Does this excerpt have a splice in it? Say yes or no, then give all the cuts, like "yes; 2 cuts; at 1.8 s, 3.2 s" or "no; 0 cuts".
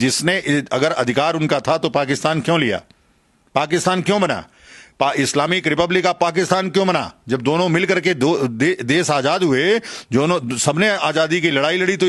no; 0 cuts